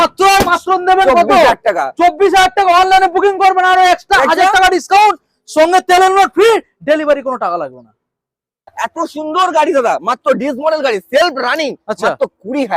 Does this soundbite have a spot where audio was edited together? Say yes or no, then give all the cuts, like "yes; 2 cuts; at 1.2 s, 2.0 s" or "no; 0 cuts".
yes; 1 cut; at 8.7 s